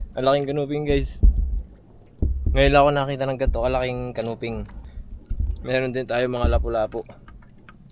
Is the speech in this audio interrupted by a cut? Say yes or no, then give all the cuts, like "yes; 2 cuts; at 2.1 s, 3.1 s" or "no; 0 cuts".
yes; 1 cut; at 4.7 s